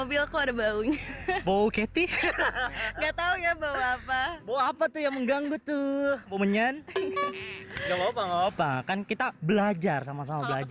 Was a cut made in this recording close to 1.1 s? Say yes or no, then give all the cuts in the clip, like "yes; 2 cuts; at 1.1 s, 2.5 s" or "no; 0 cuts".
no; 0 cuts